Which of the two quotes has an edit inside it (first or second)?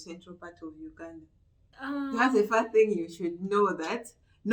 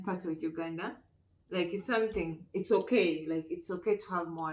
first